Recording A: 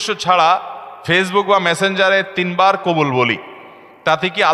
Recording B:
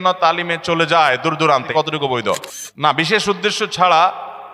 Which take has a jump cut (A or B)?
B